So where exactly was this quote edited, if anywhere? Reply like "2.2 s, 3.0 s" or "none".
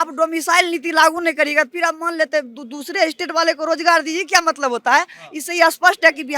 none